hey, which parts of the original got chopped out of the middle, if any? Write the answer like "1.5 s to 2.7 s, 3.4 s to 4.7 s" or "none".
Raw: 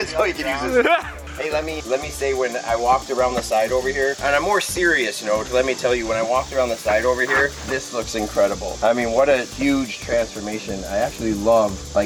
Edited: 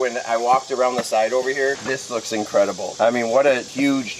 4.2 s to 7.6 s